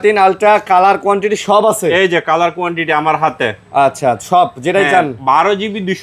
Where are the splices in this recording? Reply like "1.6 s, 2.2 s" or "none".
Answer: none